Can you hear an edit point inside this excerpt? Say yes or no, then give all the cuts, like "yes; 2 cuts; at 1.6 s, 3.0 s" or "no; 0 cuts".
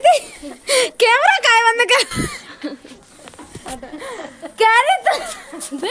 no; 0 cuts